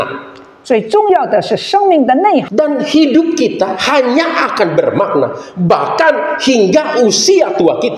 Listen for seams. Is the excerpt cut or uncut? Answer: cut